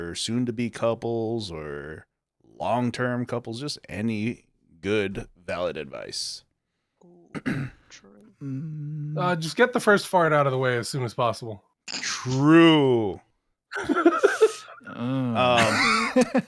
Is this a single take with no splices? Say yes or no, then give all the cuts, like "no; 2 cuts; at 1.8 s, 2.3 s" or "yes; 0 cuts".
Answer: yes; 0 cuts